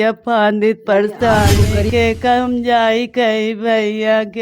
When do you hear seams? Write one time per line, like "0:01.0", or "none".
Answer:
0:01.8